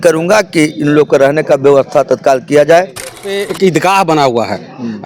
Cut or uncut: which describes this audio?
cut